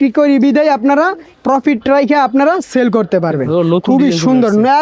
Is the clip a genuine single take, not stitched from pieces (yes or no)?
no